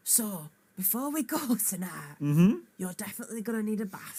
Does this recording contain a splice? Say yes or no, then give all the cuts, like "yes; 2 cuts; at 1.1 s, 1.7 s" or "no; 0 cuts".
no; 0 cuts